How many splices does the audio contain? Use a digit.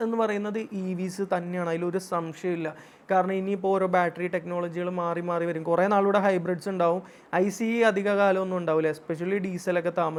0